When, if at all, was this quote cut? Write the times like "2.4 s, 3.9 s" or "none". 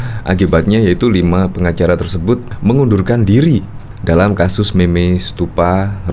2.5 s